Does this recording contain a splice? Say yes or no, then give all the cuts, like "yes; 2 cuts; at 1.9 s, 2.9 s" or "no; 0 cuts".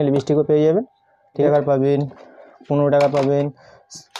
yes; 1 cut; at 1.5 s